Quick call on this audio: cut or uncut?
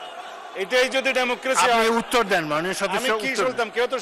uncut